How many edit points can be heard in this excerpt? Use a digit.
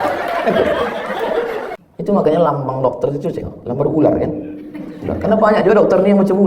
1